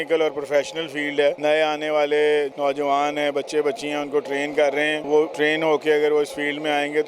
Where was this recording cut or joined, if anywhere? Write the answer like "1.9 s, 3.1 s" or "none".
1.4 s, 2.5 s, 5.2 s